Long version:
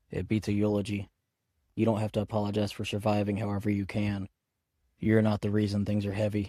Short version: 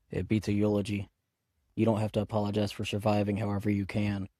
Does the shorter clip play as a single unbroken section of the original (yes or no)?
yes